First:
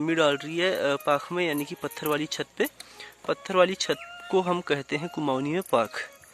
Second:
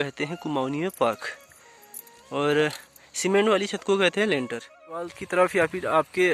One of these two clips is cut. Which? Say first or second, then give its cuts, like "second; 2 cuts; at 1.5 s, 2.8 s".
second; 1 cut; at 5.1 s